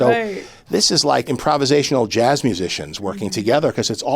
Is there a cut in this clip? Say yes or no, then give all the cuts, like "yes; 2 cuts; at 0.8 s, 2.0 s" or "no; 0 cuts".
yes; 1 cut; at 1.2 s